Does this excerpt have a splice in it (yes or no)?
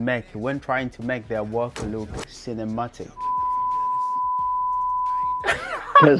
no